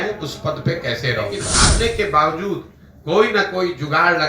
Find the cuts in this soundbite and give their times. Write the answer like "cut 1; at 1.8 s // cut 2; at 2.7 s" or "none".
cut 1; at 1.5 s